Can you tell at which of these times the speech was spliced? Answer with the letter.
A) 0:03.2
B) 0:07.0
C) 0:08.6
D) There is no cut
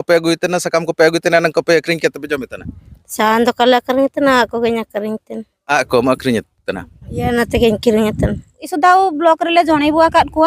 C